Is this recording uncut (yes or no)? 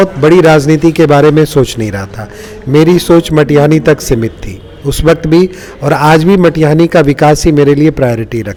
yes